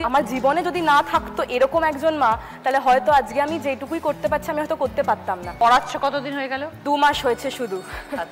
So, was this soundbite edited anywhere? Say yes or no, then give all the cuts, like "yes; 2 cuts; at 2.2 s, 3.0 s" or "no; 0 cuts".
no; 0 cuts